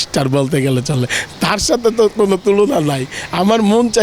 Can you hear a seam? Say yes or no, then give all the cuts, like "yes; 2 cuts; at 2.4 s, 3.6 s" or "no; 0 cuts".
no; 0 cuts